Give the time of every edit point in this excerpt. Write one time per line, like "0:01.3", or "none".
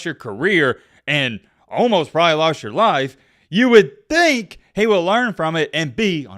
none

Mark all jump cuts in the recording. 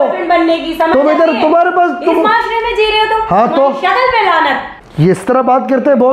0:04.7

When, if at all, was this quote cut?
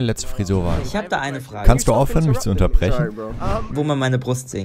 0:00.8
0:03.6

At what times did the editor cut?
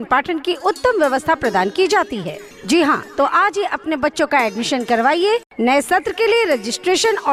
none

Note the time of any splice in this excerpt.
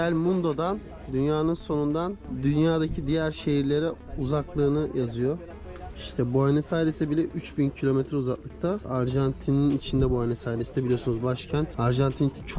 0:02.2
0:08.9
0:11.7

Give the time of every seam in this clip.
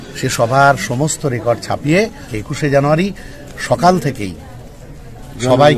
0:02.3

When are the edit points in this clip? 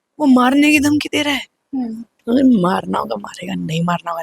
0:02.1

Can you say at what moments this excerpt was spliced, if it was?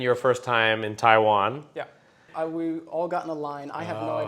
0:02.2

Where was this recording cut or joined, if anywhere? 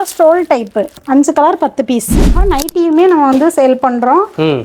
0:01.0
0:02.4

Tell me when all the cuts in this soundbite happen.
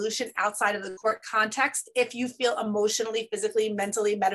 none

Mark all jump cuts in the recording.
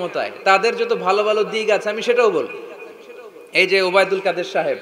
none

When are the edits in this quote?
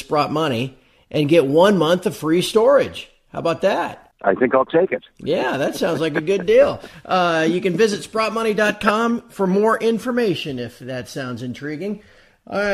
0:05.0

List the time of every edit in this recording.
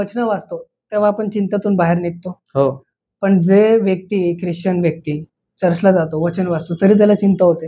none

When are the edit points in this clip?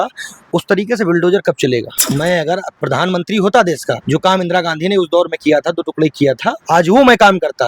0:01.9
0:02.7
0:03.9
0:06.6

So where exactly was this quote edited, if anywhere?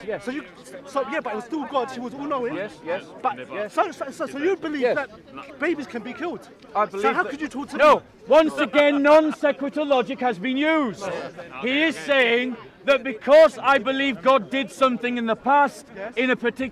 none

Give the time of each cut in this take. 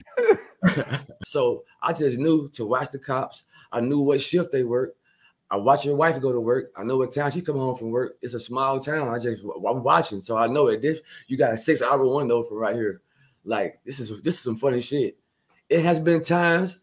0:01.0

